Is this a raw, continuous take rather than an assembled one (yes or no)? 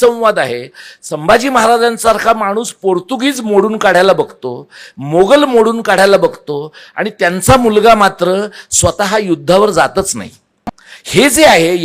yes